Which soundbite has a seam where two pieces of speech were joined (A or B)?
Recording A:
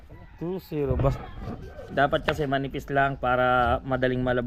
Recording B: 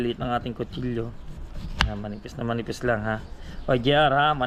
A